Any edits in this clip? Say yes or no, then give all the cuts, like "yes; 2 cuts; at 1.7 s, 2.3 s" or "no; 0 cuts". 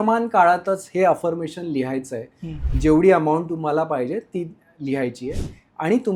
no; 0 cuts